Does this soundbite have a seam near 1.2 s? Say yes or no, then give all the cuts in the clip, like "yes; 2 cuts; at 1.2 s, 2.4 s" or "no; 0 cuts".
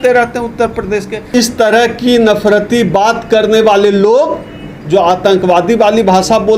yes; 1 cut; at 1.2 s